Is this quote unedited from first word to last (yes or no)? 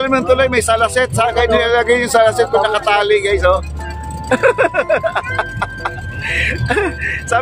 yes